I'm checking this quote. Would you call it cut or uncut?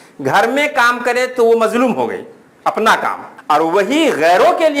cut